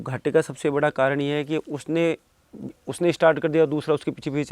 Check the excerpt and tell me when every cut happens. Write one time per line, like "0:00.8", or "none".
none